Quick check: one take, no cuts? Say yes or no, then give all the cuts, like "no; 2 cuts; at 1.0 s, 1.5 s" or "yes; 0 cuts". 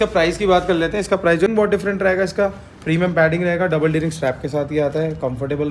no; 1 cut; at 1.5 s